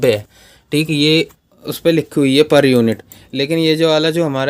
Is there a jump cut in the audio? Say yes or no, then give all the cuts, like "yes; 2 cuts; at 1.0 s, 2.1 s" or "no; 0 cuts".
no; 0 cuts